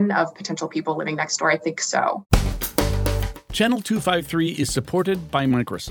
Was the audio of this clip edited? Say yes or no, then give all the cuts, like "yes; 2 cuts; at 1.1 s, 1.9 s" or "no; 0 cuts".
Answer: yes; 1 cut; at 2.2 s